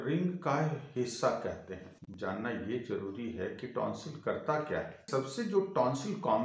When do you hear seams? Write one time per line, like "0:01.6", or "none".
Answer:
0:01.9
0:05.1